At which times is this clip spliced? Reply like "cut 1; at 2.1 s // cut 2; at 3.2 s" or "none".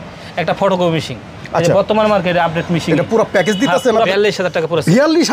cut 1; at 4.1 s

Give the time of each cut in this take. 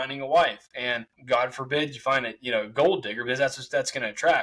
cut 1; at 1.1 s

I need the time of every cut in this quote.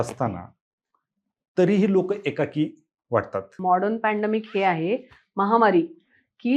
cut 1; at 3.5 s

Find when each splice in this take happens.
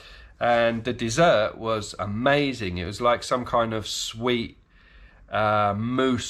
none

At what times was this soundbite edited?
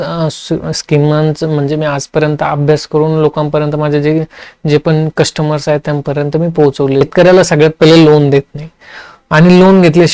cut 1; at 7.0 s

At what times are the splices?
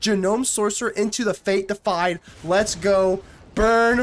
none

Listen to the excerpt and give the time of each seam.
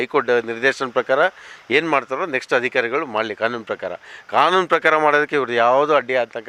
none

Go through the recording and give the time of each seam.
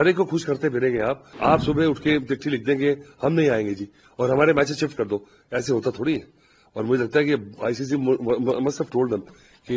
cut 1; at 1.3 s

